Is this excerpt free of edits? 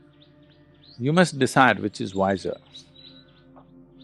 yes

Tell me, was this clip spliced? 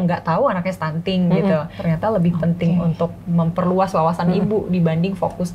yes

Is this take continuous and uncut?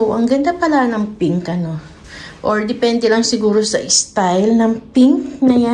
yes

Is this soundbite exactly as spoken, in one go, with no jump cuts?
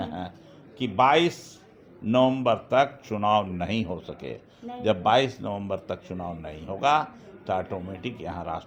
yes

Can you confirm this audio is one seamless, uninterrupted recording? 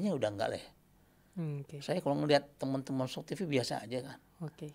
yes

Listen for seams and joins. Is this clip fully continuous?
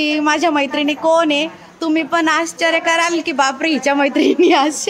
yes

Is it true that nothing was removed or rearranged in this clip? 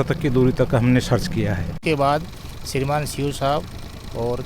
no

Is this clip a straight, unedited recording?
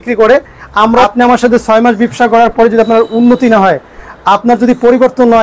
no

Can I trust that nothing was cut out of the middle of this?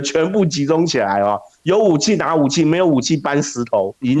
yes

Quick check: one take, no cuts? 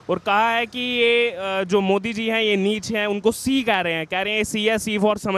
yes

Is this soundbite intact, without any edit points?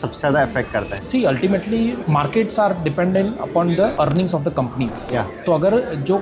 no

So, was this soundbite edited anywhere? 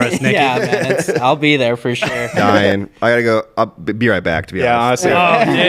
yes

